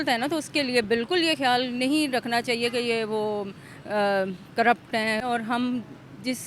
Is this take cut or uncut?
cut